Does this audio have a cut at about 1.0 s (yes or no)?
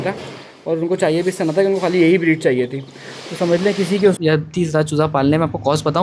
no